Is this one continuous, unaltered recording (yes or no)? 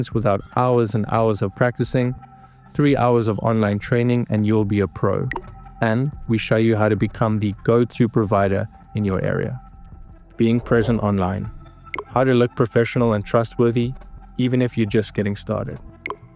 no